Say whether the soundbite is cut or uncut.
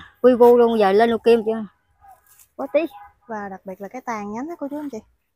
uncut